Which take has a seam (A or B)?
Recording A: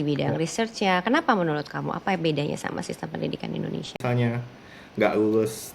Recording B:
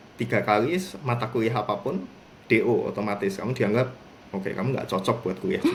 A